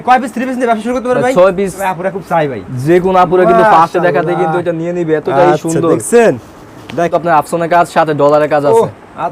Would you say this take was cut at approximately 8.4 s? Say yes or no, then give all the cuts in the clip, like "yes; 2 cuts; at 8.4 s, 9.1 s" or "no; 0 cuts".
no; 2 cuts; at 1.8 s, 7.1 s